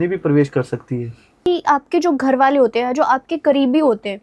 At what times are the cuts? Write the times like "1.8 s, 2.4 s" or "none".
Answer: 1.5 s